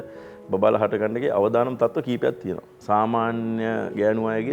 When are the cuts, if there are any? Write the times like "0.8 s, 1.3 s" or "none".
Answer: 2.8 s